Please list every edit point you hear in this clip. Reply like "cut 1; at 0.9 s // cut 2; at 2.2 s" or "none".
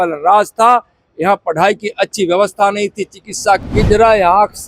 cut 1; at 3.7 s